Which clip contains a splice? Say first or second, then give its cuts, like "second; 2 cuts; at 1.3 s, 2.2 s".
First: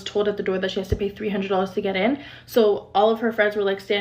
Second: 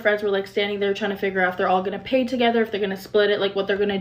first; 1 cut; at 2.3 s